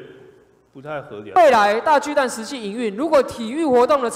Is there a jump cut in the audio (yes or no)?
yes